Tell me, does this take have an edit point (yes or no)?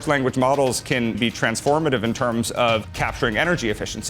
yes